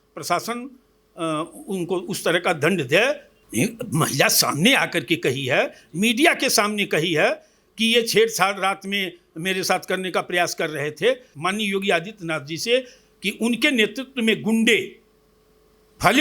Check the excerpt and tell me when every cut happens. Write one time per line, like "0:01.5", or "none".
0:03.3
0:11.3